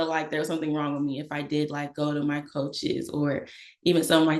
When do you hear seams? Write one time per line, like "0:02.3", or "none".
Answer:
none